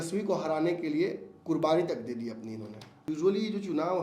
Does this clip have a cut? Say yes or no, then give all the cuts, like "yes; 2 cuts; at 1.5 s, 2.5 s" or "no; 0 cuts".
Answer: yes; 1 cut; at 2.9 s